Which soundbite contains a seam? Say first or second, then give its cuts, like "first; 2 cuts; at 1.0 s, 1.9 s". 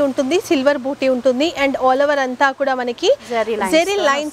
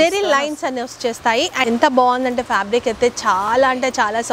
second; 1 cut; at 1.6 s